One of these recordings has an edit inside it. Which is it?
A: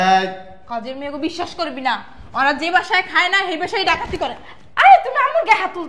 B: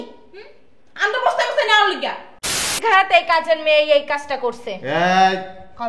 B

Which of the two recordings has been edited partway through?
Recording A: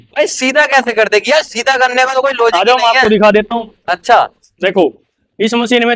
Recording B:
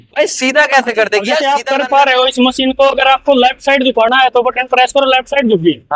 B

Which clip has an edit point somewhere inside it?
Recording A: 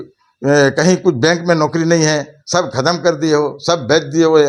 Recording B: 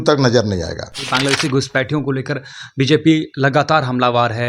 B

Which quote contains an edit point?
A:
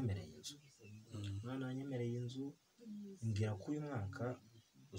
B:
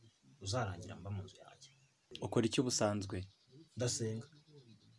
B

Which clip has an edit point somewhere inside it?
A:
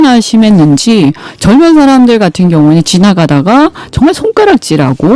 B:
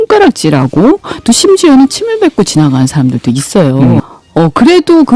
B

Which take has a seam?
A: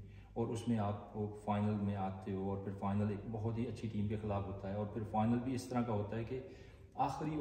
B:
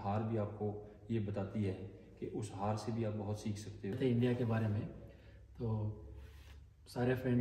B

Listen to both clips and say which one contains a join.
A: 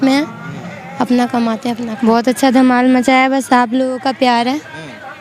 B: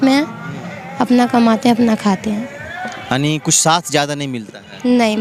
A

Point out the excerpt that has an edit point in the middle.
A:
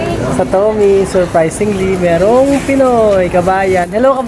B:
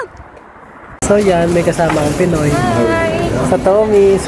B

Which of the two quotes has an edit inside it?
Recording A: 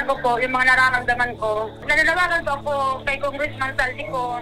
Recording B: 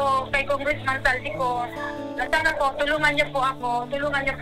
A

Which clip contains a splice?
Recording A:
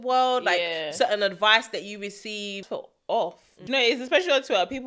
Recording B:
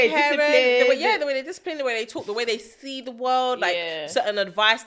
A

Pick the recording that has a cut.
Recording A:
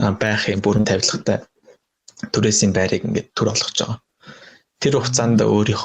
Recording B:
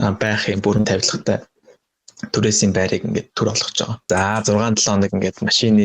B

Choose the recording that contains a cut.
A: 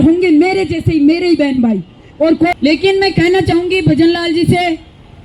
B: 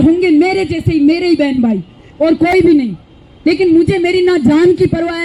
A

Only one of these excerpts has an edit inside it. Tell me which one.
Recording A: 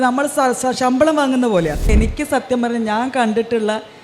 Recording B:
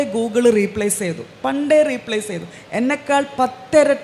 A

